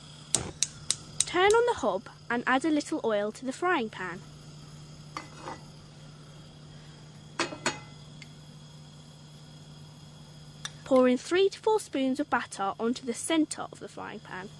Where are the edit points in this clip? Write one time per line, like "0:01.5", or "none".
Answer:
0:13.2